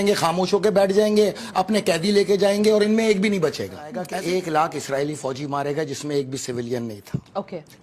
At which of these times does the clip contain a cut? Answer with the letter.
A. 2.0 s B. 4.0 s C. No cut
B